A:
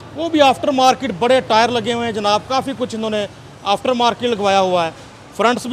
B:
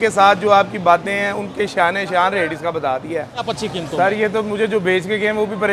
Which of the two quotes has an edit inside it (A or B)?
B